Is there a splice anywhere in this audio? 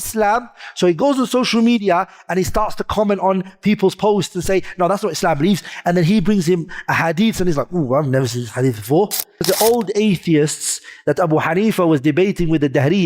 yes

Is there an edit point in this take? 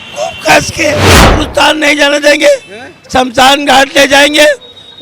yes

